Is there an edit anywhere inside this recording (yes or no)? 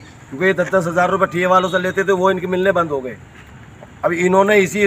no